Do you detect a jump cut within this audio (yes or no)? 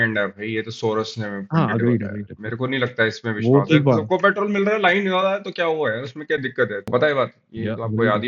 yes